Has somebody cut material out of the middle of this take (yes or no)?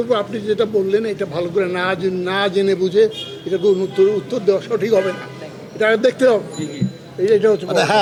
no